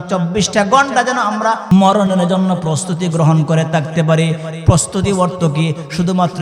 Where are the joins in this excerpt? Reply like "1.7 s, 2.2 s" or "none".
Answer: 1.7 s